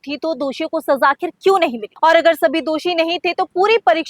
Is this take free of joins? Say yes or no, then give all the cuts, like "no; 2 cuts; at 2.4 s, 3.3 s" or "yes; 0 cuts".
no; 1 cut; at 1.8 s